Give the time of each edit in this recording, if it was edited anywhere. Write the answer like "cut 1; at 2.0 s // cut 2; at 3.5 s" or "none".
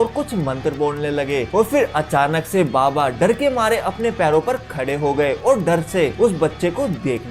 cut 1; at 1.5 s // cut 2; at 6.1 s